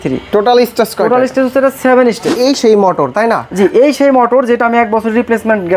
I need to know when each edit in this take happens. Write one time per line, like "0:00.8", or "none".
0:02.3